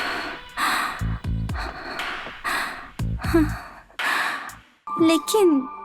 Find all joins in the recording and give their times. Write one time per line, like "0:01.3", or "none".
0:04.8